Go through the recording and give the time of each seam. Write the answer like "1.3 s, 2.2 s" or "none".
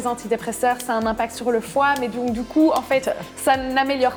none